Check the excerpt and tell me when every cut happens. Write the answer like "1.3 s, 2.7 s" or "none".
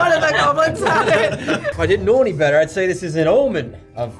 1.7 s